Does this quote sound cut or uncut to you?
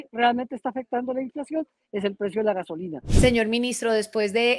cut